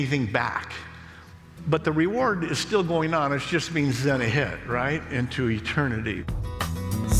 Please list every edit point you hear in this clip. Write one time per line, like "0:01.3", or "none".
0:06.3